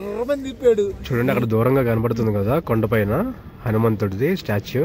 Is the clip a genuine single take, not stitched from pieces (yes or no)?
no